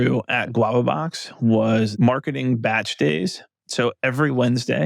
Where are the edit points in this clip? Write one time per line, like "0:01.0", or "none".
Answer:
0:01.9